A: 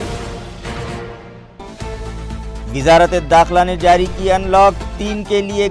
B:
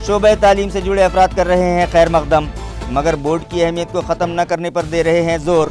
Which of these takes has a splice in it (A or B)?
A